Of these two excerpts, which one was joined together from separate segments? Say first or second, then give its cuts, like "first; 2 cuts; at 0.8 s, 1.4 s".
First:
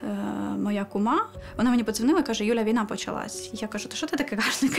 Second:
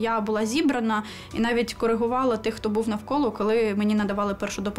first; 1 cut; at 1.4 s